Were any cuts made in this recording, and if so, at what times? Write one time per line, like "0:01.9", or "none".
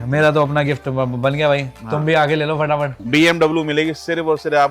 0:03.0